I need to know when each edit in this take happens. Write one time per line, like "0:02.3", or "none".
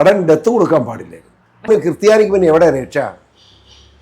0:01.7

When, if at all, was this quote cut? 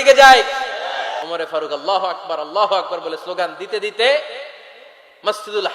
0:01.2

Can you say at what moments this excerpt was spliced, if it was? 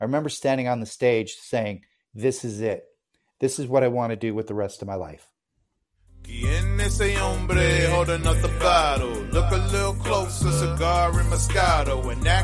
0:06.3

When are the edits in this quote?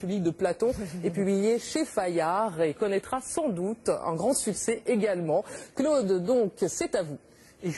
0:02.4

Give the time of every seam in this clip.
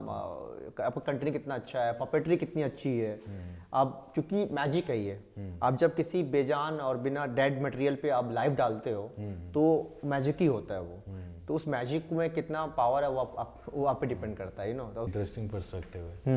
0:15.1

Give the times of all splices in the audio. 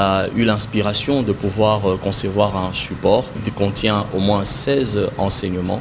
0:03.5

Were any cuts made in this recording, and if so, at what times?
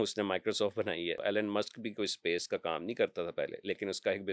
0:01.2

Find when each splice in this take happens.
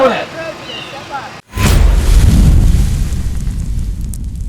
0:01.4

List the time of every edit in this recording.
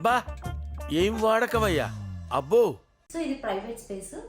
0:02.9

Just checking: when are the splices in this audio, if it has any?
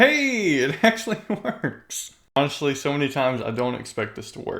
0:02.4

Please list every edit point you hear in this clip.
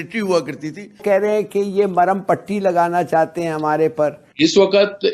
0:01.0
0:04.2

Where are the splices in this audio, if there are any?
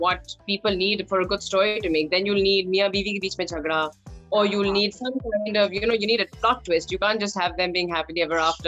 none

